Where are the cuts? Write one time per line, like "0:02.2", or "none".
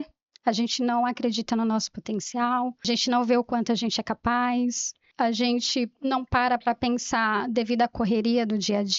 0:02.8
0:05.1